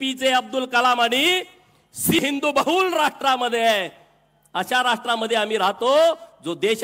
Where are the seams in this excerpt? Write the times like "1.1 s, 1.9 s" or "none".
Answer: 2.2 s